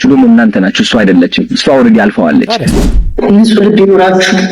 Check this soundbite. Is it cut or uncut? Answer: cut